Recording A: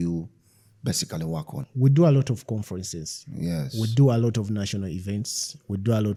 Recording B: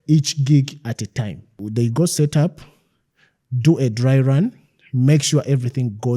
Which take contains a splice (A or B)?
B